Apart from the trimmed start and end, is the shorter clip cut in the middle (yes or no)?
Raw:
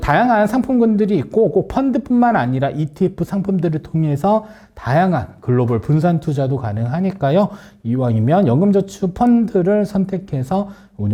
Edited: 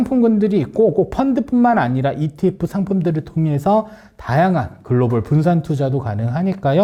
no